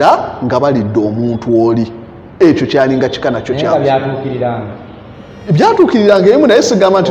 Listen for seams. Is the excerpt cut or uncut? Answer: uncut